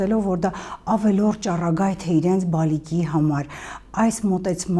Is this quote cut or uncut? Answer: uncut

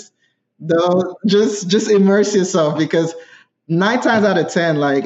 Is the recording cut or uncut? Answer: uncut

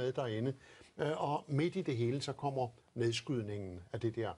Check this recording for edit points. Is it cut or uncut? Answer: cut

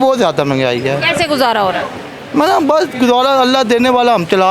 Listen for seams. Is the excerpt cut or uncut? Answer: uncut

